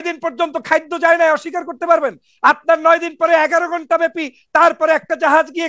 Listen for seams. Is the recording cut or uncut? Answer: uncut